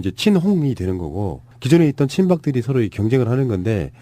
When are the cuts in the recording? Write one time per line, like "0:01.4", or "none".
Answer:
0:01.7